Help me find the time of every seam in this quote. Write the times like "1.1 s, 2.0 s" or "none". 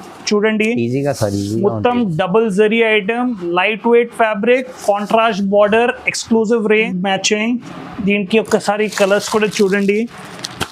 6.9 s